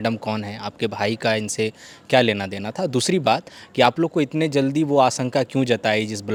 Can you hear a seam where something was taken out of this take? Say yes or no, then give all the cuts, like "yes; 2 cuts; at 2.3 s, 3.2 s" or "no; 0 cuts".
no; 0 cuts